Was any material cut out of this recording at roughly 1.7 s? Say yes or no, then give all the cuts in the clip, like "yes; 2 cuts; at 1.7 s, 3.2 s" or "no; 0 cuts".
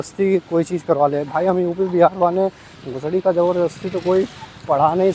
no; 0 cuts